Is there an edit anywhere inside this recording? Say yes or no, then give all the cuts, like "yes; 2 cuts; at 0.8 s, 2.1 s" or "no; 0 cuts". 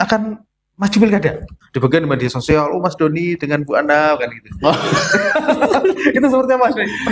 yes; 1 cut; at 1.6 s